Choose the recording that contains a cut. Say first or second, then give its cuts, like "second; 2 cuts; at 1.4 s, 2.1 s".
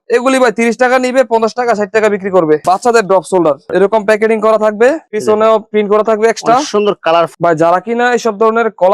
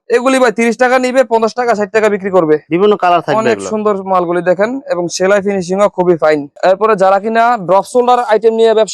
first; 2 cuts; at 2.6 s, 7.3 s